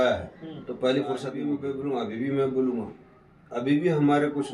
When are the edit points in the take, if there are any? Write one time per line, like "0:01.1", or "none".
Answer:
0:01.6

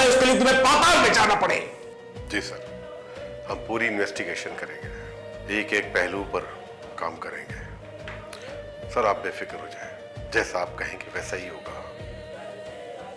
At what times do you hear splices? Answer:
none

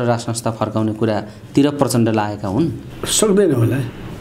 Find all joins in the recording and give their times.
none

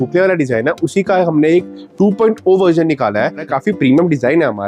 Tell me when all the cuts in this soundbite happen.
0:03.4

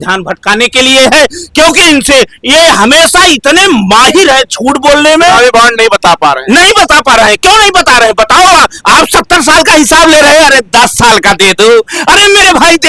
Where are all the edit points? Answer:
none

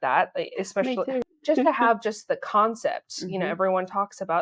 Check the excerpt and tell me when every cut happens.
0:01.2

